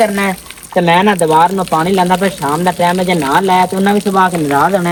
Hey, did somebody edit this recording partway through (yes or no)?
no